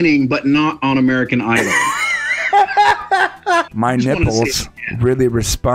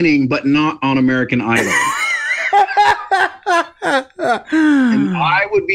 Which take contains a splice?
first; 1 cut; at 3.7 s

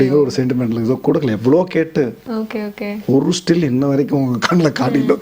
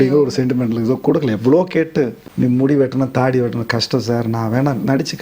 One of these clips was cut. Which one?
second; 1 cut; at 2.2 s

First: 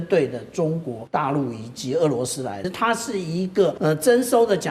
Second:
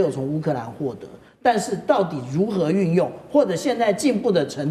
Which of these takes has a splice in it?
first; 3 cuts; at 0.9 s, 2.7 s, 3.8 s

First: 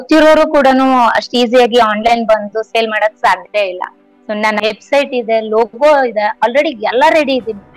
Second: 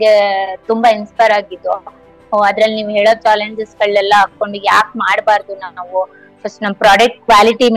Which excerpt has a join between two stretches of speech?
first; 1 cut; at 4.6 s

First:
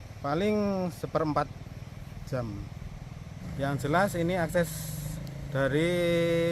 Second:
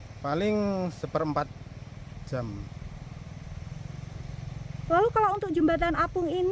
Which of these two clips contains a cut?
first; 1 cut; at 3.3 s

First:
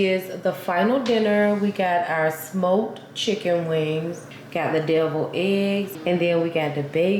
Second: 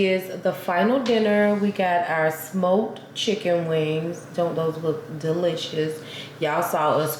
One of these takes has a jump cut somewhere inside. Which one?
first; 2 cuts; at 4.2 s, 5.9 s

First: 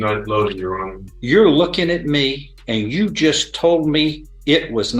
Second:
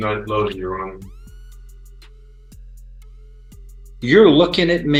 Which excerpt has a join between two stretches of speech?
first; 2 cuts; at 1.0 s, 2.5 s

